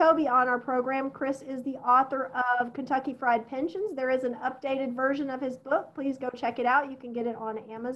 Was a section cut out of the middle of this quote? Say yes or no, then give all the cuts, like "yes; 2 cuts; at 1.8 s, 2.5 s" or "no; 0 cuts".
no; 0 cuts